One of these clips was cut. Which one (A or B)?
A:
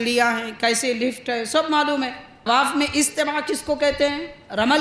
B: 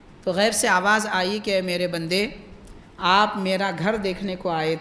A